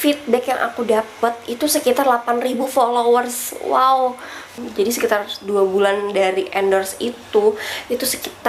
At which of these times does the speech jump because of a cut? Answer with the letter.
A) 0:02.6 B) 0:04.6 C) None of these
B